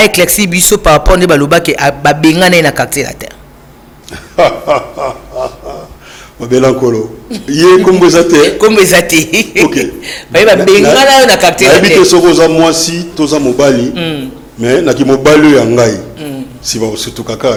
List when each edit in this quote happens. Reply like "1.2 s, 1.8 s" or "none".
none